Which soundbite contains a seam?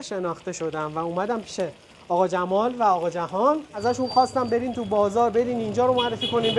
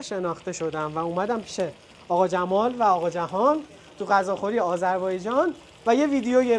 first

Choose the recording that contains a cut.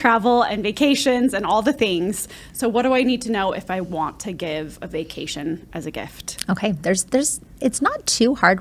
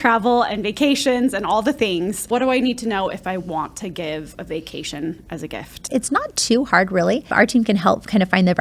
second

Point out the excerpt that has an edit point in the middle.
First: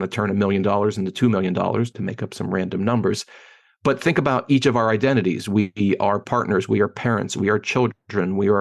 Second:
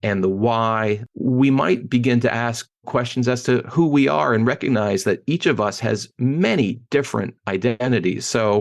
second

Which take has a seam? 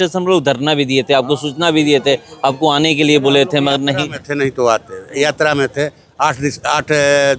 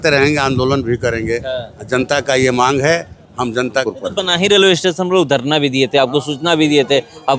second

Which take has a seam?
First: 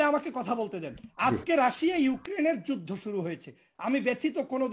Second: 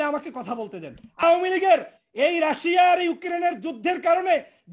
second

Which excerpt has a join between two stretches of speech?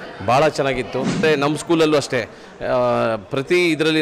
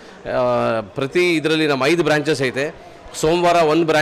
first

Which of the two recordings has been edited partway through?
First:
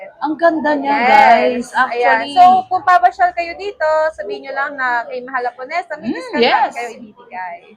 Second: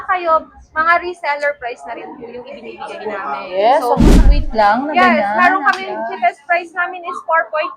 second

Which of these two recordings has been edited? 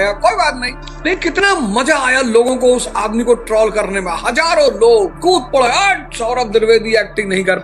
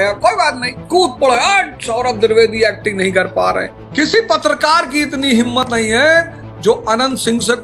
second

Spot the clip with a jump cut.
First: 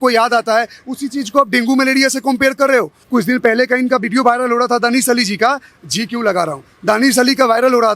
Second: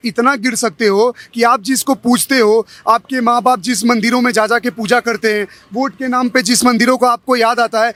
first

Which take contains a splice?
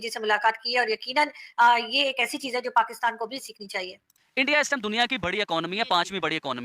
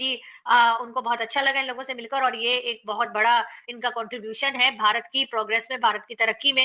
first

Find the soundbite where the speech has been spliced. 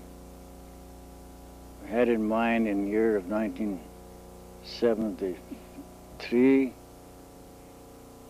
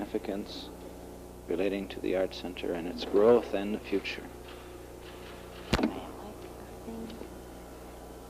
second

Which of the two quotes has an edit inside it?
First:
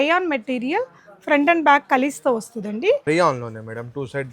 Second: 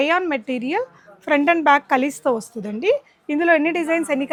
first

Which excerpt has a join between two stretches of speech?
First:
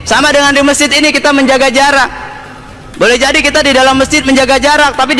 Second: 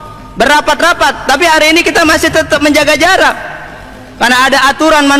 first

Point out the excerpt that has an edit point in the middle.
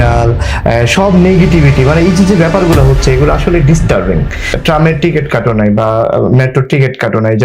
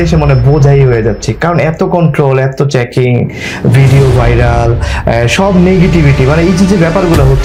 first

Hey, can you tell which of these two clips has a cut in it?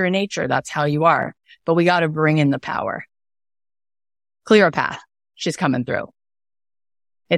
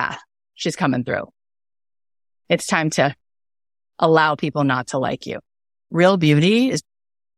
second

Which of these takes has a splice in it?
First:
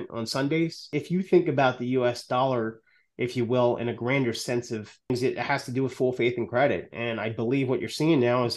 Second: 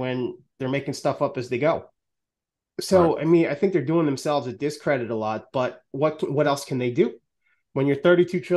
first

